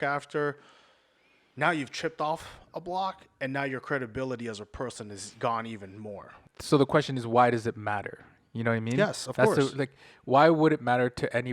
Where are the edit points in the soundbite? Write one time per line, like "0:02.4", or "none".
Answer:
0:06.5